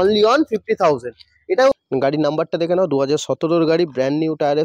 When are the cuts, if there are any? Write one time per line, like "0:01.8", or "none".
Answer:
0:01.8